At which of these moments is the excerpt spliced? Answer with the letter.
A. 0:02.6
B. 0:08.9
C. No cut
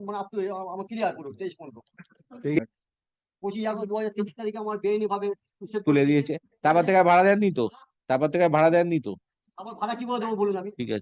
A